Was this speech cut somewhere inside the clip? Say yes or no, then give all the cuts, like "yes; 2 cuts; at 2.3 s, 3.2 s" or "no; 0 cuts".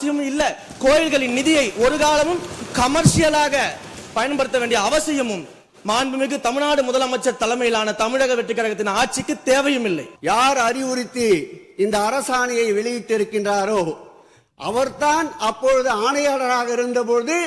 yes; 1 cut; at 10.1 s